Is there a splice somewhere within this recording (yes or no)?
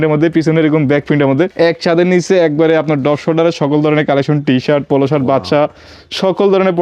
yes